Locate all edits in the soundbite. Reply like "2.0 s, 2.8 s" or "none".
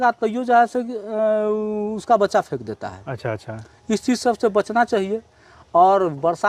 none